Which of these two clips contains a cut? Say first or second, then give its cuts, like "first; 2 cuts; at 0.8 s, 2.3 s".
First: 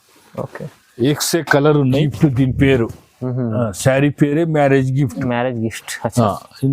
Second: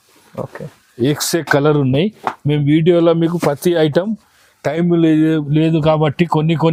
first; 1 cut; at 2.1 s